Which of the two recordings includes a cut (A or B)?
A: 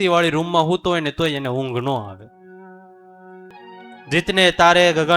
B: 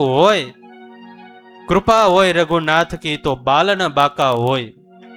A